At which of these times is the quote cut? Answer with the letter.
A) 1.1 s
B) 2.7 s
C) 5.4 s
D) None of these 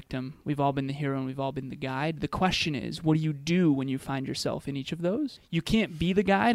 C